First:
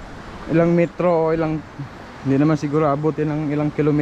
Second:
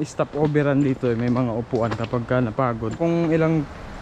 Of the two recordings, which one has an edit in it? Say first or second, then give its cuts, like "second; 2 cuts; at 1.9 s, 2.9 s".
second; 1 cut; at 3.0 s